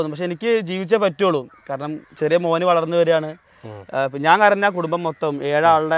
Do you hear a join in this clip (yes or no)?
no